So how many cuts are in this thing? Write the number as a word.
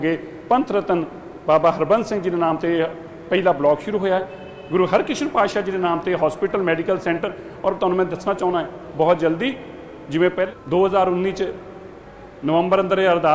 one